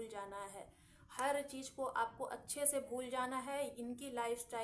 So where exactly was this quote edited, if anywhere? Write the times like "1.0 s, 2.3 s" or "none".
none